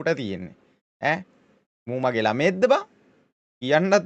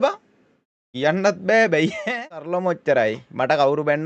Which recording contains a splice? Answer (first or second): second